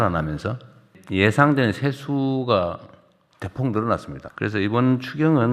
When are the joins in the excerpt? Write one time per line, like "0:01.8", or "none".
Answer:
0:01.0
0:04.2